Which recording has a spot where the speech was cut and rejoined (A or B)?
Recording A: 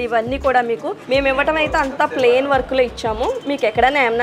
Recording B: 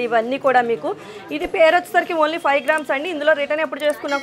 A